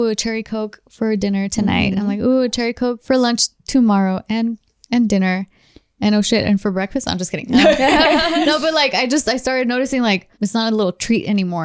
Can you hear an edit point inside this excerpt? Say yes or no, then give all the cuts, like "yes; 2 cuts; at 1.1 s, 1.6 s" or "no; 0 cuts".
yes; 2 cuts; at 3.0 s, 10.3 s